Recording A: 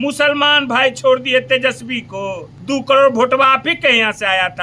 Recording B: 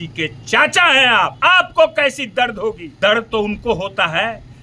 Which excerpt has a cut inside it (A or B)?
B